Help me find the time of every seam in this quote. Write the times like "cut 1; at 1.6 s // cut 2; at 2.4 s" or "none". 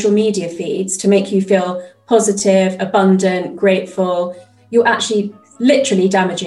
cut 1; at 5.4 s